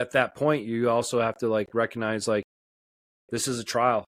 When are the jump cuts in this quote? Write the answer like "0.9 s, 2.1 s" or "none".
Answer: none